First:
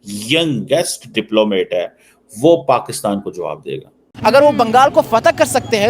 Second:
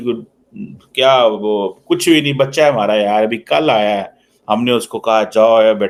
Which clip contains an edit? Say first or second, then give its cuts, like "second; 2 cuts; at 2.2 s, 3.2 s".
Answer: first; 1 cut; at 4.1 s